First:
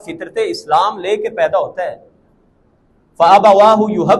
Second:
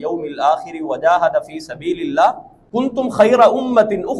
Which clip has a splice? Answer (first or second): second